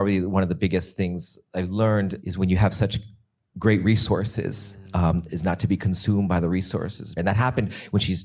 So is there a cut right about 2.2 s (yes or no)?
yes